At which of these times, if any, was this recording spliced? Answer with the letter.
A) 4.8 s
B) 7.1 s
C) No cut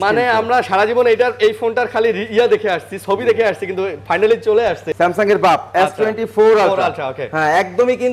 A